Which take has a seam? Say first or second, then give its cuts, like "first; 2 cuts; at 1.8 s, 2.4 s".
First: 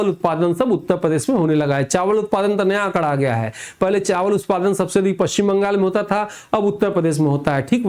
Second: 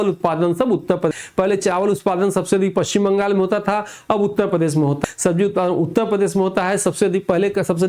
second; 2 cuts; at 1.1 s, 5.0 s